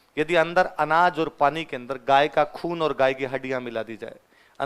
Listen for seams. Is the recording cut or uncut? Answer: uncut